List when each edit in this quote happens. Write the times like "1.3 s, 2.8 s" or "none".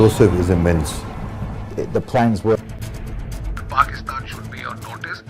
2.6 s

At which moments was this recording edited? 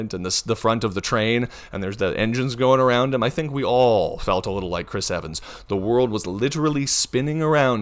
none

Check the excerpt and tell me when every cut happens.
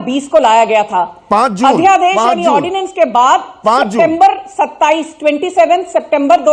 none

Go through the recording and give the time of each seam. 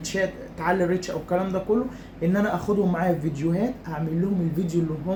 none

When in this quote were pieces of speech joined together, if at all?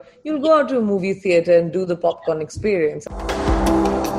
3.1 s

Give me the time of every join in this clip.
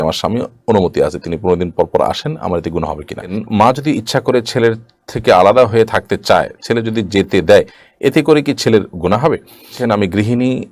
3.4 s, 9.8 s

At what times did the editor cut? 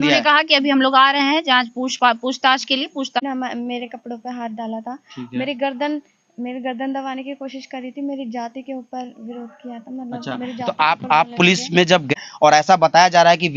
3.2 s, 12.1 s

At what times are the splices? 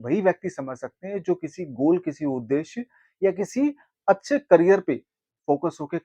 none

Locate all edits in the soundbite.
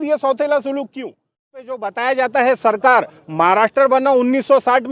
1.6 s

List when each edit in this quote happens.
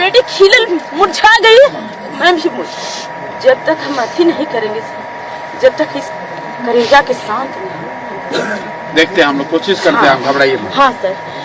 3.3 s

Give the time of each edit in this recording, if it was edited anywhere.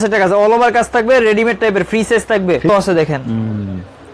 2.7 s

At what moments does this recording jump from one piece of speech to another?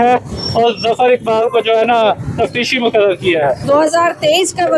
3.6 s

